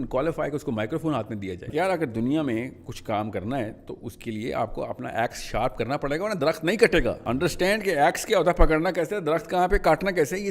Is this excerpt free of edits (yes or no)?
no